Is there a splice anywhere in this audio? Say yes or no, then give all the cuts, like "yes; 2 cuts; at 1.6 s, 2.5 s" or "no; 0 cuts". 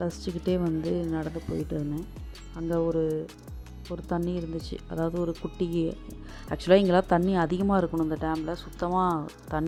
no; 0 cuts